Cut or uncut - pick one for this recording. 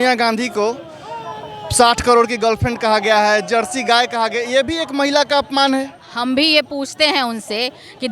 uncut